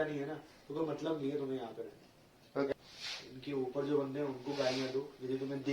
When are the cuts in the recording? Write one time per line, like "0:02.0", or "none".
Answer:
0:02.7

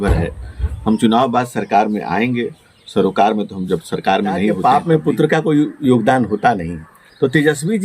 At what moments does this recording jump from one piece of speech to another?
0:04.6

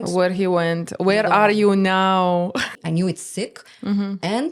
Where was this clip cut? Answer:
0:02.7

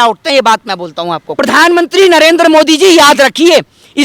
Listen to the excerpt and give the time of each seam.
0:01.2

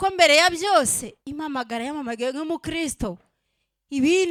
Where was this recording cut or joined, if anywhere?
none

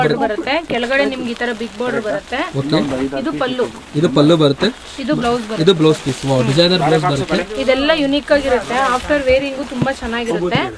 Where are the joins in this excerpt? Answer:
none

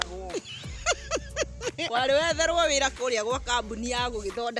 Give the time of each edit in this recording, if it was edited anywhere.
0:01.8

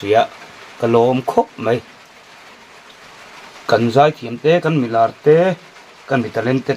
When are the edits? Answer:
0:03.0

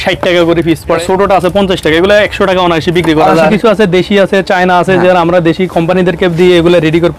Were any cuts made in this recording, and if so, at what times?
0:01.0
0:03.5

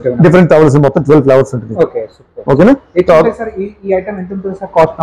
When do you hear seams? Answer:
none

